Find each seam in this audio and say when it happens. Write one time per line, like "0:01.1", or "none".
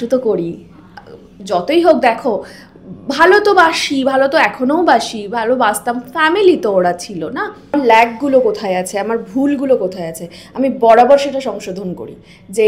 0:07.8